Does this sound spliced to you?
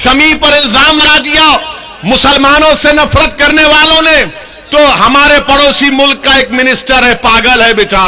yes; 1 cut; at 1.0 s

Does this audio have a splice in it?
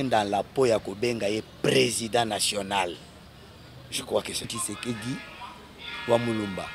yes; 1 cut; at 4.6 s

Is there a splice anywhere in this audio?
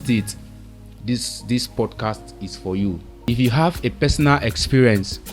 yes; 1 cut; at 3.3 s

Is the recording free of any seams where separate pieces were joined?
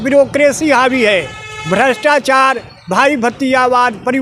yes; 0 cuts

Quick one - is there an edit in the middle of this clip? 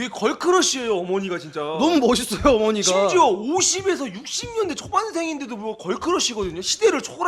no; 0 cuts

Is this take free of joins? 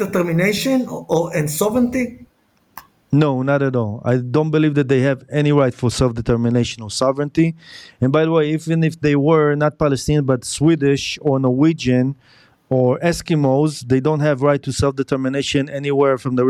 yes; 0 cuts

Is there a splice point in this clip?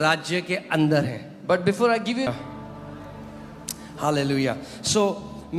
yes; 1 cut; at 2.3 s

